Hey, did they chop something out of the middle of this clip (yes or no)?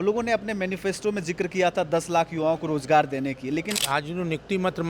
yes